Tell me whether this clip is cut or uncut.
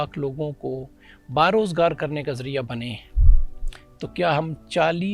uncut